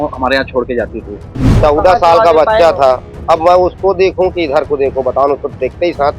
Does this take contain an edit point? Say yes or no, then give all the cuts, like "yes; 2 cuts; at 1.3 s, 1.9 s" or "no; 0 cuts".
yes; 1 cut; at 1.6 s